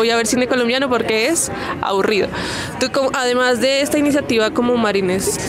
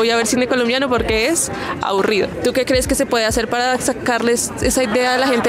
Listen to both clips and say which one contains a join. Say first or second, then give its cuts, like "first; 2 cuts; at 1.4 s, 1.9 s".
second; 1 cut; at 2.3 s